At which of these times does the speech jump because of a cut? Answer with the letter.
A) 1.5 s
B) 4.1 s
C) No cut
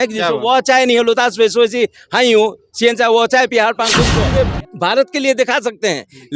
B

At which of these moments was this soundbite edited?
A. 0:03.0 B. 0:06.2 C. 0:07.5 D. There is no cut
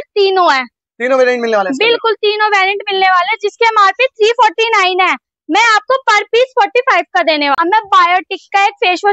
C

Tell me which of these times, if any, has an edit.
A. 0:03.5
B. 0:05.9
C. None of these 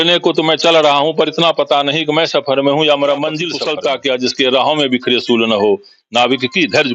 A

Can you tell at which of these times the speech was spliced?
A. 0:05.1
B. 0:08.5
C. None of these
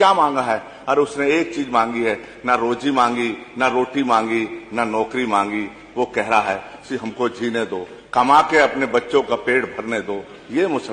C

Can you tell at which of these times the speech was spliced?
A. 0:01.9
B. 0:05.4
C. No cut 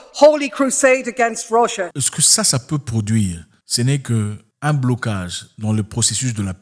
C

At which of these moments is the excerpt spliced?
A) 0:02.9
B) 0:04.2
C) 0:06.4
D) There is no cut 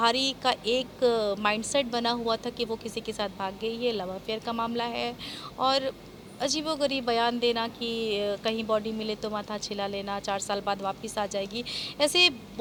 D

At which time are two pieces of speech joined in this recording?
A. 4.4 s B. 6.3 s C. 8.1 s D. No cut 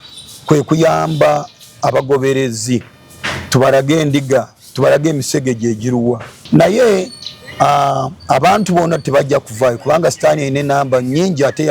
B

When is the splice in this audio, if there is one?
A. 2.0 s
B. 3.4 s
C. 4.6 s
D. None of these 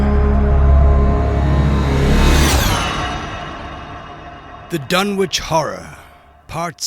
C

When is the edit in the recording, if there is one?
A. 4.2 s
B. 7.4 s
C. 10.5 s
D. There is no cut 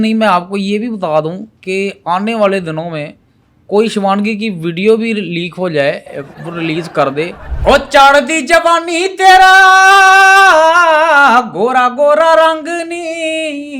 B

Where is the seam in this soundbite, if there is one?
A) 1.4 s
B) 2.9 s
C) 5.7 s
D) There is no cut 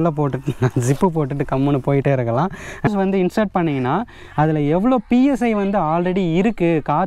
B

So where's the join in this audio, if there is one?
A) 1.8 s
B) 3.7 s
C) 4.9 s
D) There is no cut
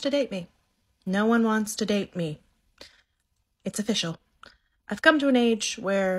D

